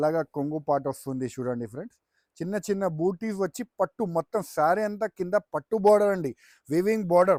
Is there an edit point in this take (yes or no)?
no